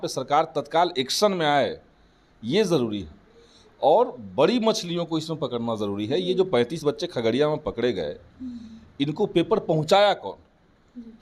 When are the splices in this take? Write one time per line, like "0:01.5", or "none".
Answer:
none